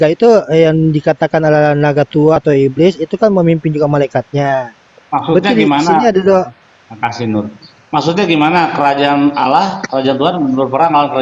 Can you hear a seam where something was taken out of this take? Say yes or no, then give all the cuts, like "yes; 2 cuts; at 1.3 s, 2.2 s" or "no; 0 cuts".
no; 0 cuts